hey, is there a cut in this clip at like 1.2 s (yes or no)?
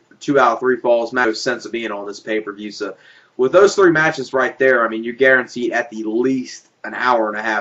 no